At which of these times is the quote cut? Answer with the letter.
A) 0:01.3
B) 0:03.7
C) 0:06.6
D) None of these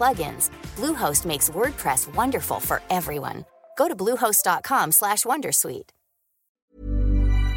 C